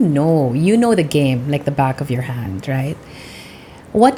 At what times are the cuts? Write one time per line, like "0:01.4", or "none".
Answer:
none